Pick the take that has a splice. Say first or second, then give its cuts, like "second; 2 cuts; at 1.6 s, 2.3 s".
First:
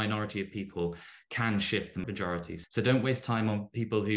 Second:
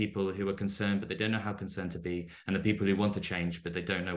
first; 1 cut; at 2.3 s